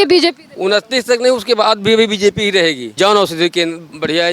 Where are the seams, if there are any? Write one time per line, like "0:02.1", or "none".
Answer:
0:02.9